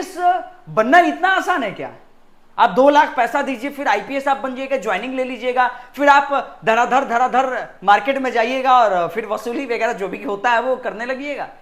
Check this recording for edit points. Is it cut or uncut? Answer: uncut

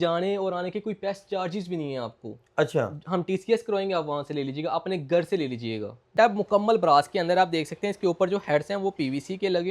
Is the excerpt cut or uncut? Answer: cut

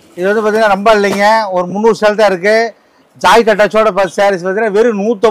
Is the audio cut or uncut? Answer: uncut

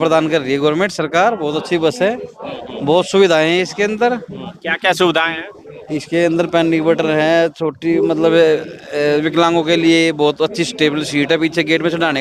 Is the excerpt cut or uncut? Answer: uncut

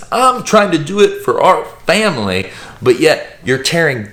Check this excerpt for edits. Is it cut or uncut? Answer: uncut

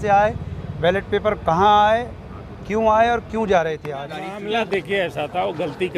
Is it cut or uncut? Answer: cut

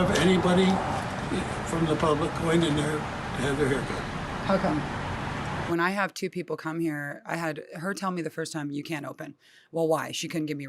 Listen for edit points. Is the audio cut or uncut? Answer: cut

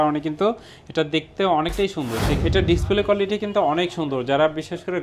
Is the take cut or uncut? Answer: cut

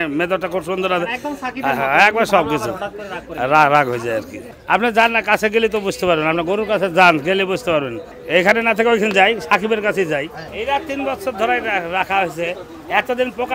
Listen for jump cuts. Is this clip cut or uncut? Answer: uncut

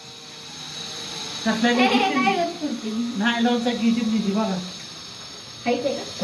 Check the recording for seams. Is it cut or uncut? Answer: uncut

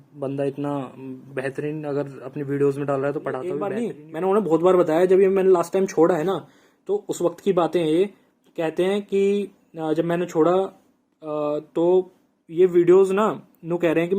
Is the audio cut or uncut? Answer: cut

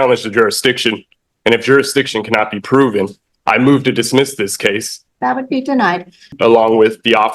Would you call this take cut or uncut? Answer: cut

